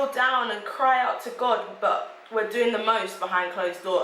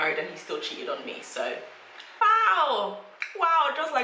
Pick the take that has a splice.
second; 1 cut; at 2.2 s

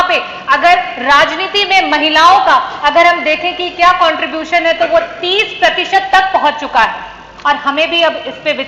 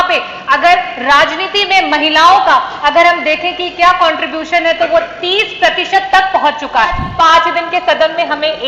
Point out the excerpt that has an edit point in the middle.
second; 1 cut; at 7.1 s

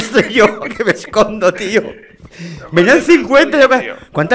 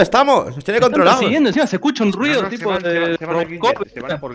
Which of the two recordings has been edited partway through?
second; 1 cut; at 1.2 s

